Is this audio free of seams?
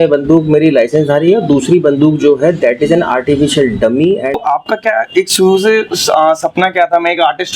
no; 1 cut; at 4.3 s

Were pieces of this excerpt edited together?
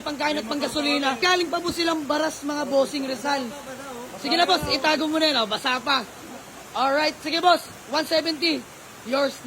yes; 1 cut; at 1.2 s

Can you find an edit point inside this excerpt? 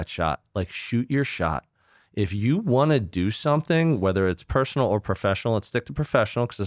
no; 0 cuts

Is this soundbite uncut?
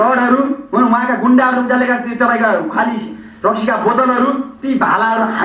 yes; 0 cuts

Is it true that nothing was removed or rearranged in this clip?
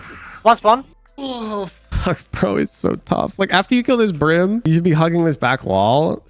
yes; 0 cuts

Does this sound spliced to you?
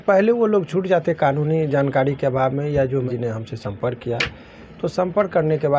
yes; 1 cut; at 3.1 s

